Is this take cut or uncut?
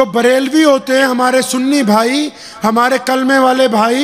uncut